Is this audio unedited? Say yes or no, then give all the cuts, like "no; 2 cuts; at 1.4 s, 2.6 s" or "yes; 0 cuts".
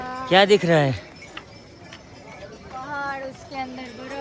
yes; 0 cuts